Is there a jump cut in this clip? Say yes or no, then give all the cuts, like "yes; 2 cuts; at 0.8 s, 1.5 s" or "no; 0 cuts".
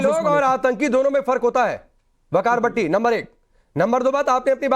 yes; 1 cut; at 3.0 s